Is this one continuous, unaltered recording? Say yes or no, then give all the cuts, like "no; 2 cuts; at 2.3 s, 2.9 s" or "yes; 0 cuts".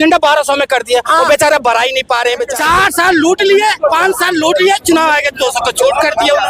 no; 1 cut; at 2.5 s